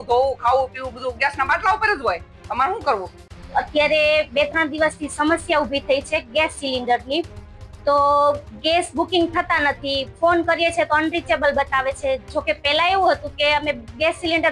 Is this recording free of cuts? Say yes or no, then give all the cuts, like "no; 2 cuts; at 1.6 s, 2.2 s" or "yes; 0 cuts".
yes; 0 cuts